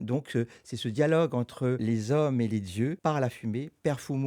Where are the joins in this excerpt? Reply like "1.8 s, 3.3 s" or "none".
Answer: 1.8 s, 3.0 s